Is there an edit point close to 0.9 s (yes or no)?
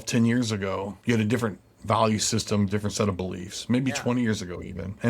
yes